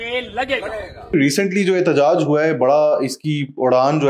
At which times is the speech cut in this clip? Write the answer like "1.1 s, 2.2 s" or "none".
1.1 s